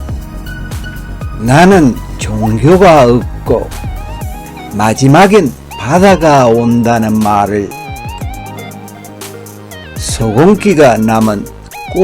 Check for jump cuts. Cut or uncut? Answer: cut